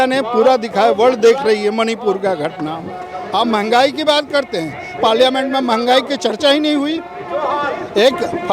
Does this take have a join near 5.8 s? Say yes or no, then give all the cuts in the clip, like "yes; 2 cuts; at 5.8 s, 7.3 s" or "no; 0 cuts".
no; 1 cut; at 3.1 s